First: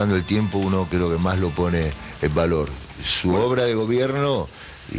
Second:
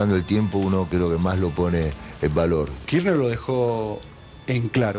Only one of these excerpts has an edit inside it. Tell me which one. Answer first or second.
second